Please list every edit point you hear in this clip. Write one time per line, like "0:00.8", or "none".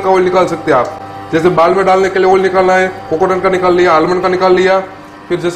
none